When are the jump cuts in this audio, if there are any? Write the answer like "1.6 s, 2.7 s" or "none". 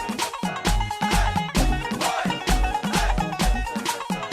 1.5 s

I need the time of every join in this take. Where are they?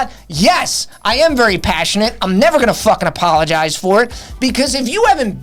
none

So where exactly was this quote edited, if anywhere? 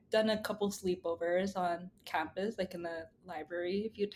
none

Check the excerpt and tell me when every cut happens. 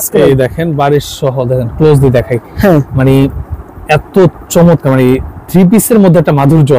none

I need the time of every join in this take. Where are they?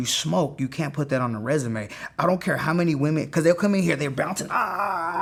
none

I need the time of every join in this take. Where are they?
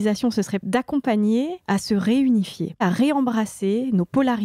2.8 s

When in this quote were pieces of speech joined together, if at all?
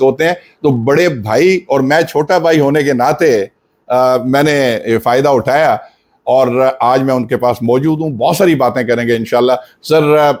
none

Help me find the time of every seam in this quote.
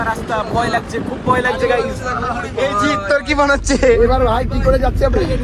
none

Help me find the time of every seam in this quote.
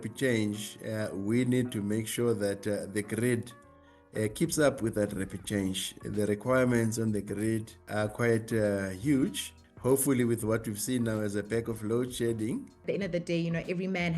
12.8 s

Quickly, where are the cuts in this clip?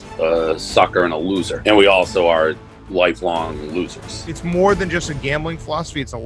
1.5 s, 4.2 s

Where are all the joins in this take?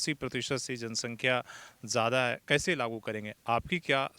none

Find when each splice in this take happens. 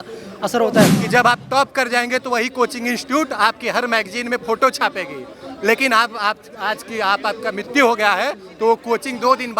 0.9 s

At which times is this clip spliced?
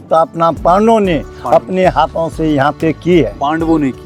none

